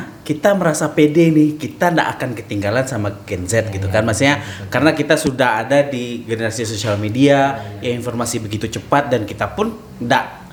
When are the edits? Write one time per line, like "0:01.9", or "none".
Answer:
none